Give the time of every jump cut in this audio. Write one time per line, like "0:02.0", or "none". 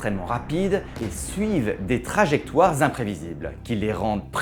0:01.0